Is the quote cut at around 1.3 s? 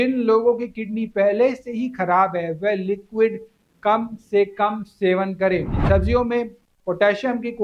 no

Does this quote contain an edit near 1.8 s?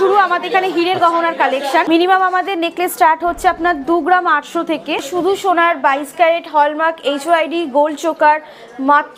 yes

